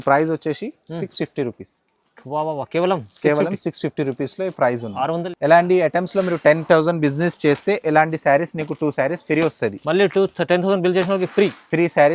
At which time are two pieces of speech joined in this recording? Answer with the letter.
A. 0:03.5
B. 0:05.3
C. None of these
B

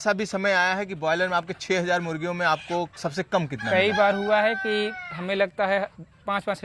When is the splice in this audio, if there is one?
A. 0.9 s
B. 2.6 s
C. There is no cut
C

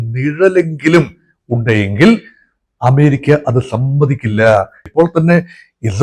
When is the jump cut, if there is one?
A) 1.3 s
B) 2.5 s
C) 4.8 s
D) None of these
C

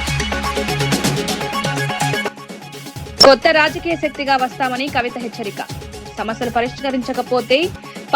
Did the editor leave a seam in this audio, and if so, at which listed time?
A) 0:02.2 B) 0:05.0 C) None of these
A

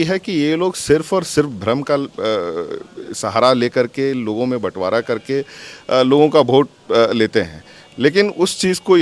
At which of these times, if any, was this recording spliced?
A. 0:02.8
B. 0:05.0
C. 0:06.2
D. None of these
D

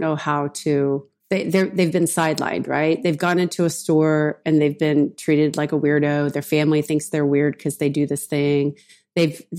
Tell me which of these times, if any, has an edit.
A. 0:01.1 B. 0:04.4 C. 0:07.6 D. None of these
A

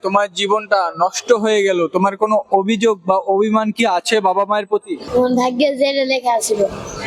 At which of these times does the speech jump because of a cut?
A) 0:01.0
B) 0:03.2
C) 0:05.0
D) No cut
C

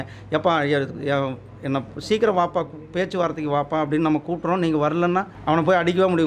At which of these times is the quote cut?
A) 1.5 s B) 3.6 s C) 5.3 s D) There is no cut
C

